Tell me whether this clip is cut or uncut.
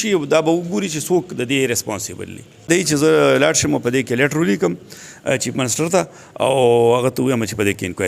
cut